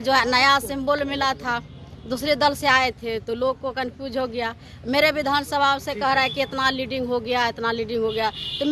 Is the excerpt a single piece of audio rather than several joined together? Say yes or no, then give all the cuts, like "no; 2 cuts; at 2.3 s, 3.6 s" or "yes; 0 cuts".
yes; 0 cuts